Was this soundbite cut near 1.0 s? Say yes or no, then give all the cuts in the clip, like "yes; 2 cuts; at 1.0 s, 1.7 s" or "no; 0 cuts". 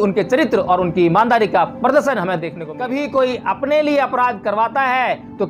no; 1 cut; at 2.5 s